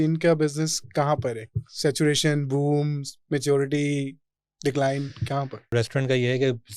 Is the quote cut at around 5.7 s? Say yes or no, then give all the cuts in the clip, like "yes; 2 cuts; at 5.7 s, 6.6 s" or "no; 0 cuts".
yes; 1 cut; at 5.7 s